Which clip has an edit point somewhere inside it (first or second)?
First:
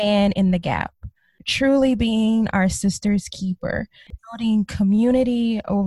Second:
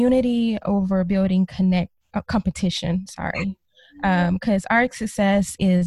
first